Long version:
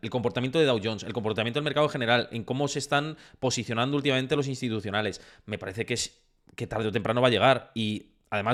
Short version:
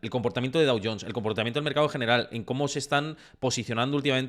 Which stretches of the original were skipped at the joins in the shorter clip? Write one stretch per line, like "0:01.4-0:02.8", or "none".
none